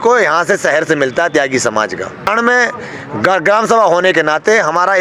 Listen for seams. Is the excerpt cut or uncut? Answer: cut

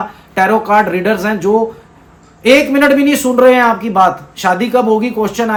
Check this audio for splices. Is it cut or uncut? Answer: uncut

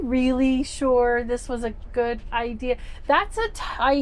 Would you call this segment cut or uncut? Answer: uncut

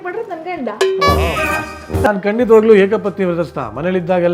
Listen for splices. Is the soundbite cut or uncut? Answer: cut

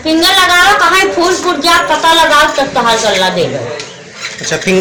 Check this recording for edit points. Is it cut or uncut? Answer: uncut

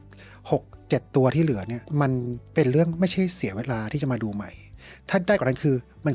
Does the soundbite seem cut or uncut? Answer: uncut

